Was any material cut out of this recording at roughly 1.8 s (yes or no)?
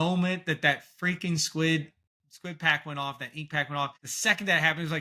no